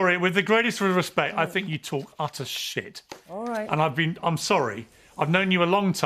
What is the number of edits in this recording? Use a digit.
0